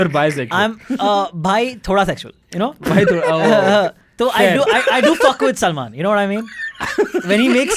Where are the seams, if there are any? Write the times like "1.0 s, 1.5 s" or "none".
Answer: none